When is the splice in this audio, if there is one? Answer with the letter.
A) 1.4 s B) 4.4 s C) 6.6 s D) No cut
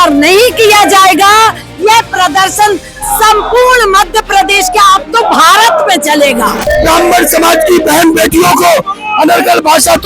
C